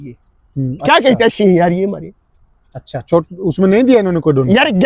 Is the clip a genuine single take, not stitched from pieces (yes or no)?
yes